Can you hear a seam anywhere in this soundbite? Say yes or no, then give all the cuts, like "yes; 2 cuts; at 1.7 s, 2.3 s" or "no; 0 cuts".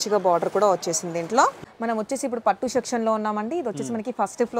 yes; 1 cut; at 1.6 s